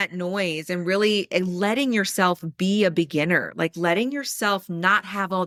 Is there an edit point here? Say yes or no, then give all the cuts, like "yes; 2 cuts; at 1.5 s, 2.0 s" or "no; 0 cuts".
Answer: no; 0 cuts